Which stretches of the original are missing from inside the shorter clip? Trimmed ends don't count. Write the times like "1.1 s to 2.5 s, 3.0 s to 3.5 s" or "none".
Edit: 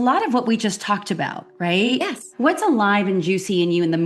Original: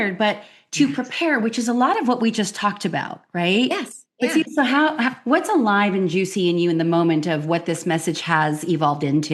4.1 s to 5.2 s